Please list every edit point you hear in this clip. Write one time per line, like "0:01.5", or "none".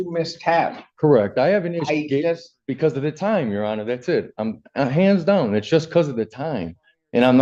none